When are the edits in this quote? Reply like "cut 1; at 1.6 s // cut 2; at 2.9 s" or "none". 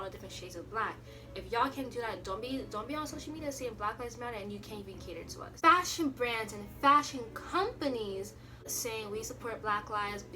cut 1; at 5.5 s // cut 2; at 8.6 s